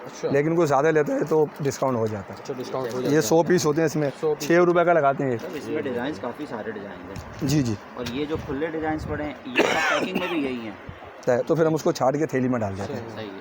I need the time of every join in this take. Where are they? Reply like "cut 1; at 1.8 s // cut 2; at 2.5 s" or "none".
none